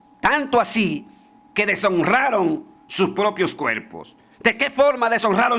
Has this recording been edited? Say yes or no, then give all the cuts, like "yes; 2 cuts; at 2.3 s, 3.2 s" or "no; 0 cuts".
no; 0 cuts